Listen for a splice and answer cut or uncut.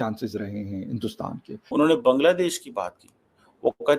cut